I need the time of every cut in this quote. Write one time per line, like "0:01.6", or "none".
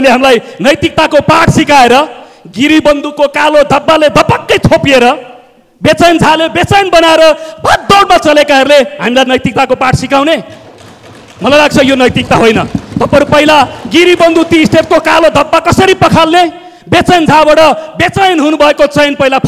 none